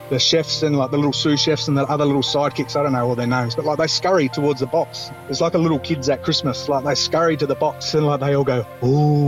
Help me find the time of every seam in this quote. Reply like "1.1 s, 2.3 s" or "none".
7.8 s